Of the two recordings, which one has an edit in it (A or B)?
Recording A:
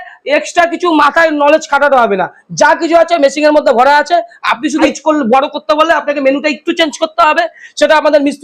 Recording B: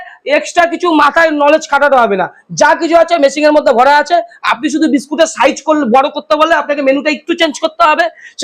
A